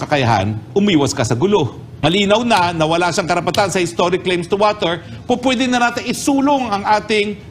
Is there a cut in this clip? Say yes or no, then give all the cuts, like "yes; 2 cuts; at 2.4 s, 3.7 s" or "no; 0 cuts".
yes; 1 cut; at 1.8 s